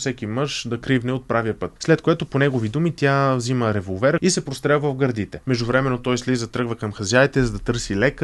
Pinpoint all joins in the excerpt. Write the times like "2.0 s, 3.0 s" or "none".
1.7 s, 4.2 s, 5.3 s